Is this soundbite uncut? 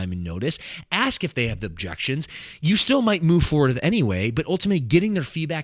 yes; 0 cuts

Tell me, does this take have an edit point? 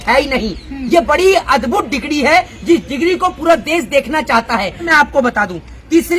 yes; 1 cut; at 4.9 s

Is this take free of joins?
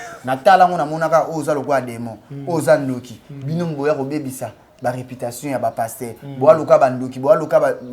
yes; 0 cuts

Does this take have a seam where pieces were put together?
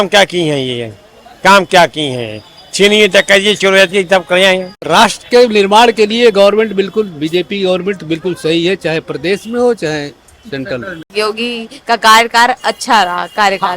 yes; 2 cuts; at 4.9 s, 11.0 s

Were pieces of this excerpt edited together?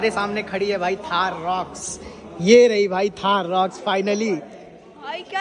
no; 0 cuts

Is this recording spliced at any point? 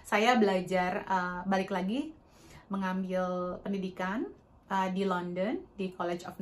no; 0 cuts

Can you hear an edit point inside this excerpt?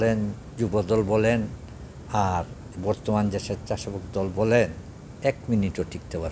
yes; 1 cut; at 2.7 s

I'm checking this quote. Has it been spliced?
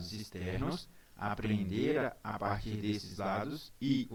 no; 0 cuts

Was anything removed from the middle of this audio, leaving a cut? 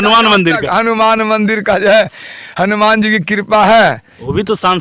no; 0 cuts

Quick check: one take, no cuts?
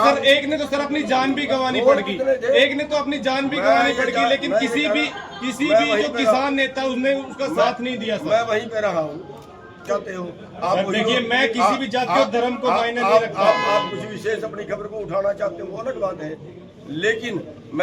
no; 1 cut; at 9.9 s

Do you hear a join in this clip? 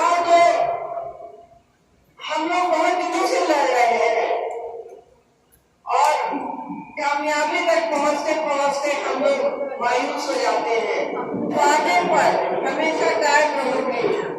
yes; 1 cut; at 11.6 s

